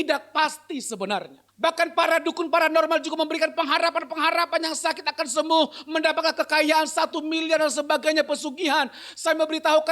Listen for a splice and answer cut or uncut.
cut